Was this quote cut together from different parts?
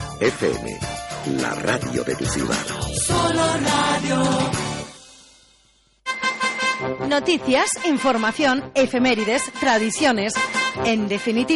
yes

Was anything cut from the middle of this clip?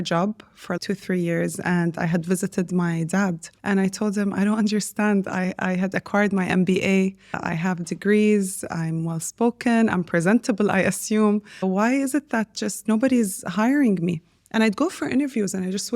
yes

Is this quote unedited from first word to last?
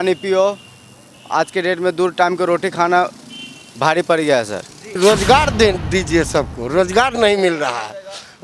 no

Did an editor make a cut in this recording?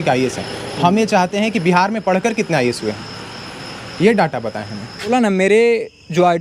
yes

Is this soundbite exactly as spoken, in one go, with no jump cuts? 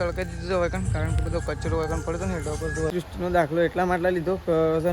no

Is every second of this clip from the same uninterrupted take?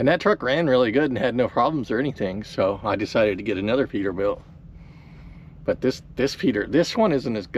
yes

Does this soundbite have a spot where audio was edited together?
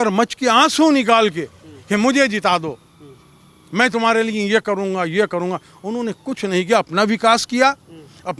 no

